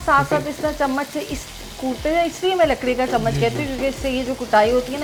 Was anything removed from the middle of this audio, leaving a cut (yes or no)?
no